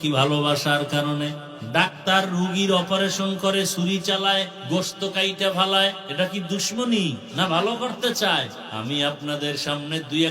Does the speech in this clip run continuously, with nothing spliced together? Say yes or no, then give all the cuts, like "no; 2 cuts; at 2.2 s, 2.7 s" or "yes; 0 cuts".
no; 5 cuts; at 1.5 s, 4.6 s, 6.0 s, 7.2 s, 8.6 s